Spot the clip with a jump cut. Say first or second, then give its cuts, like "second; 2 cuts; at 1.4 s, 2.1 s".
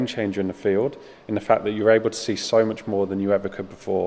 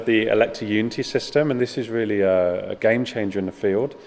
second; 1 cut; at 1.6 s